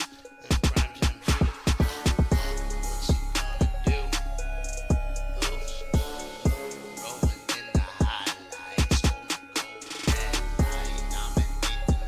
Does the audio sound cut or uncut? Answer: cut